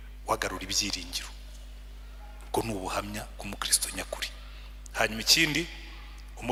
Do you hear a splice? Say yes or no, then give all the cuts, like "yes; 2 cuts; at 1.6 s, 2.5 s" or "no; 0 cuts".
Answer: no; 0 cuts